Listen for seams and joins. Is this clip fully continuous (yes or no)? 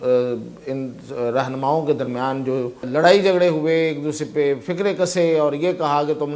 no